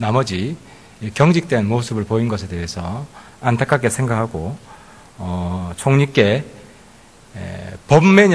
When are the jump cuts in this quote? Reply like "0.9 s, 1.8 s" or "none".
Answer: 6.3 s